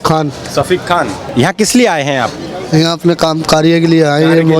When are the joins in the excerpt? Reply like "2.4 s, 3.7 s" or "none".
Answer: 1.2 s

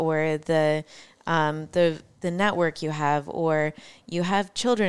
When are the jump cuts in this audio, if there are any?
none

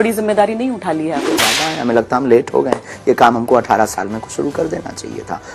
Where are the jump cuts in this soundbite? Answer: none

